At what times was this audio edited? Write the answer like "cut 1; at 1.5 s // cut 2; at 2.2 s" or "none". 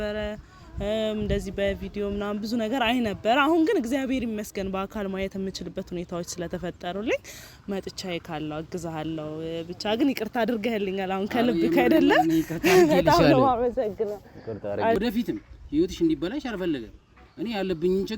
cut 1; at 15.0 s